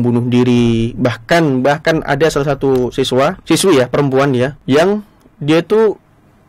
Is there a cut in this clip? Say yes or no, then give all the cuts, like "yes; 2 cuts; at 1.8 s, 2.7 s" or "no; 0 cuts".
yes; 2 cuts; at 3.4 s, 4.6 s